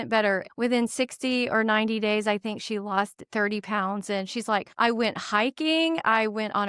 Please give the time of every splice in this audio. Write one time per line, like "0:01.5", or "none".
0:04.7